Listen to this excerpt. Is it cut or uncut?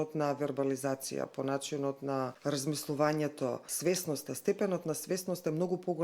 cut